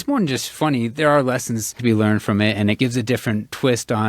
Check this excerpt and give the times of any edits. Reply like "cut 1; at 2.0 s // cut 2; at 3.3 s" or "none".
cut 1; at 1.8 s // cut 2; at 2.8 s